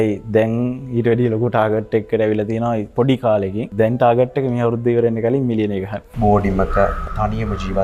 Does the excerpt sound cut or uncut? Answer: cut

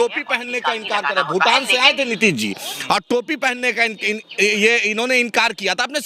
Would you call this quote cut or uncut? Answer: uncut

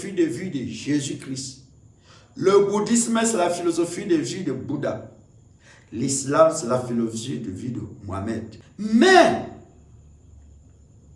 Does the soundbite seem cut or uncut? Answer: cut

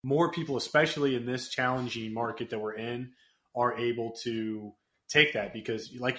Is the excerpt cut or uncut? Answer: uncut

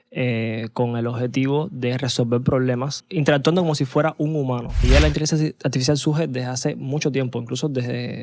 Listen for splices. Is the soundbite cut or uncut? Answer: cut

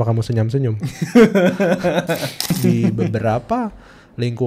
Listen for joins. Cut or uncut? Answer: cut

